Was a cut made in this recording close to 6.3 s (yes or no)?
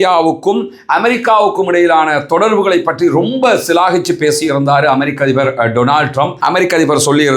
yes